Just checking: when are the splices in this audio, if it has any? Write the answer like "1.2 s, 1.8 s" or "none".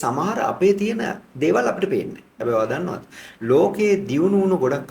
2.3 s

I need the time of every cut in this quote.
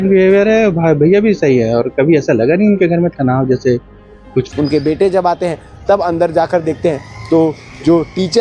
4.5 s

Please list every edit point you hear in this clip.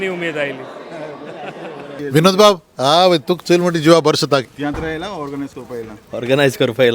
2.0 s, 4.4 s

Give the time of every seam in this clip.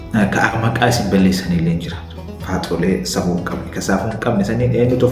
none

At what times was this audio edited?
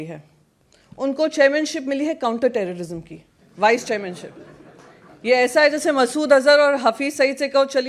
none

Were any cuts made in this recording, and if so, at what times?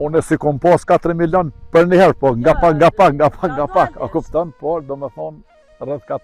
none

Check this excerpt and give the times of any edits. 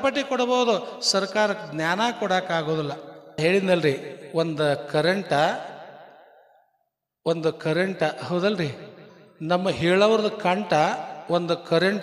3.4 s

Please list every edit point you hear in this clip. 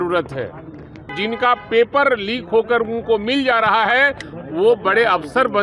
1.1 s

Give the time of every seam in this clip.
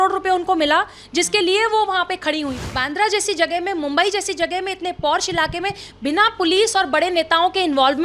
2.7 s

